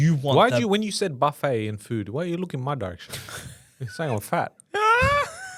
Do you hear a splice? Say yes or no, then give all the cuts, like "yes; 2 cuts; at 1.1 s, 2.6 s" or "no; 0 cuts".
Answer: no; 0 cuts